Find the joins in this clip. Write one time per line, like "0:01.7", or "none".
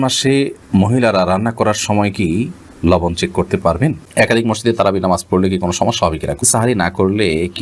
0:04.0
0:06.4

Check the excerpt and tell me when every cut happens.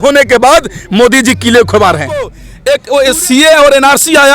0:02.4

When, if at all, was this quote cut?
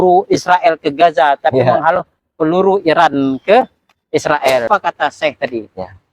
0:04.7

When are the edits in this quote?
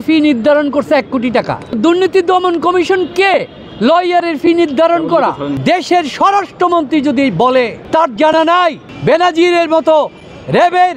0:01.8
0:05.5
0:07.8
0:08.9

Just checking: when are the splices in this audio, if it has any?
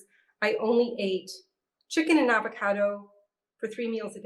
none

